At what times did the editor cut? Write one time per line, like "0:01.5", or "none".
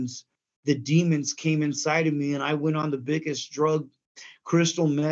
none

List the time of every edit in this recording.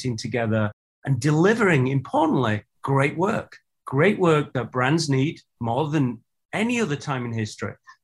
none

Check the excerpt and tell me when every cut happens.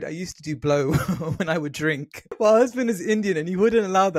0:02.3

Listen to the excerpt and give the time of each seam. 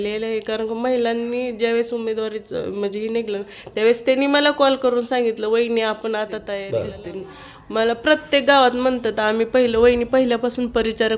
0:06.5

